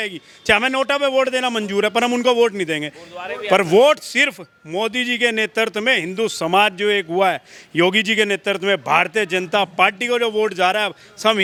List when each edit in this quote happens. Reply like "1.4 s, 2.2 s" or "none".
none